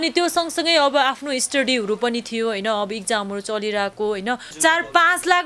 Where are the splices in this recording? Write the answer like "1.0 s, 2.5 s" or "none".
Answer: 4.5 s